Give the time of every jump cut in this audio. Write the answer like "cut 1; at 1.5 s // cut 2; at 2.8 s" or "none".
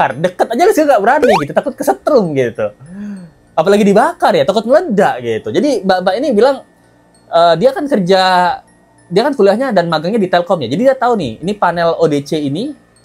none